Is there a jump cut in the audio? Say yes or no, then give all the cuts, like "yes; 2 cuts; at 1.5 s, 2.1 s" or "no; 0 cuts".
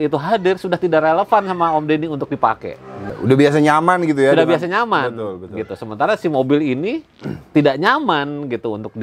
yes; 1 cut; at 3.1 s